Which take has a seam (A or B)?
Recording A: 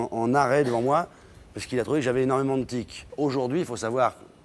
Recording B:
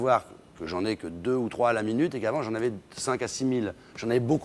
A